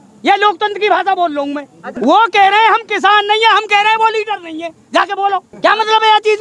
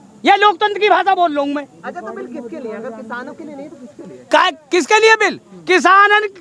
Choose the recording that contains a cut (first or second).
first